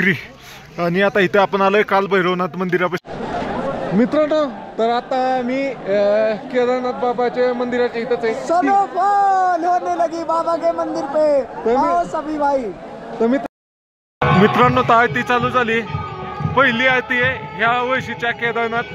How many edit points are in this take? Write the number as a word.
two